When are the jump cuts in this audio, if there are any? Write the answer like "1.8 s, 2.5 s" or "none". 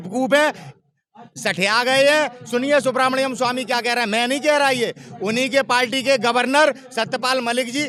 none